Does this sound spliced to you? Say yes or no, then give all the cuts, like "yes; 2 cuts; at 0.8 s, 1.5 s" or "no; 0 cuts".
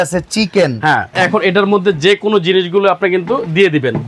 yes; 1 cut; at 1.1 s